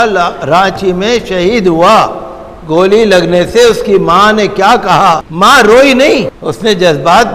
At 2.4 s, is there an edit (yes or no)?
no